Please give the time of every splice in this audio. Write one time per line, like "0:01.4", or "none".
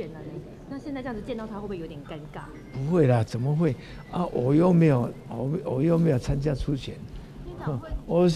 none